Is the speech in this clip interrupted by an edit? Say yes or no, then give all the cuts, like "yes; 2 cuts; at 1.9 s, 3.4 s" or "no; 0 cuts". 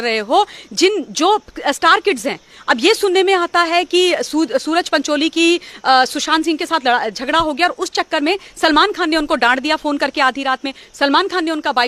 no; 0 cuts